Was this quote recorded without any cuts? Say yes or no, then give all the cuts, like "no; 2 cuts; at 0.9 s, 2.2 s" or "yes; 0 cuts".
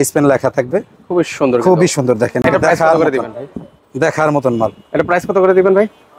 yes; 0 cuts